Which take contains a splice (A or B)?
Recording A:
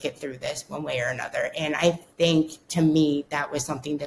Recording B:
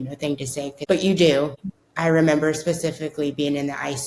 B